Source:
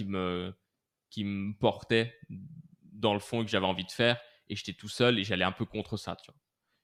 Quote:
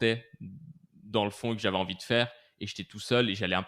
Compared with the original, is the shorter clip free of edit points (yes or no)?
yes